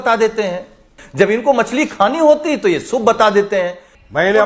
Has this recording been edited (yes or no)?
yes